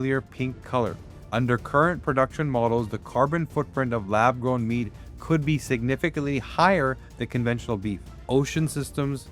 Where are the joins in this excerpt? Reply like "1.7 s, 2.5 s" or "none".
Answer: 1.1 s, 8.1 s